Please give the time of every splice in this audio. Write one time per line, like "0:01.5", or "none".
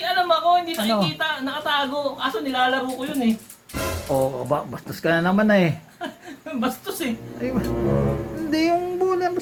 none